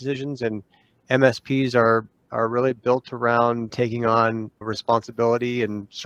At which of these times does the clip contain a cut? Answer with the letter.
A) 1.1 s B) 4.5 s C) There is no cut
C